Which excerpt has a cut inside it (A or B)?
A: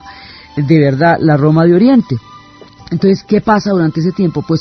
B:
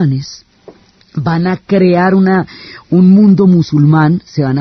A